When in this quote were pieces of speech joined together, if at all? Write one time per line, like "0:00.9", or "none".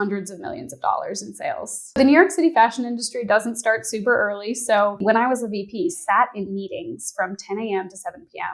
0:01.9
0:05.0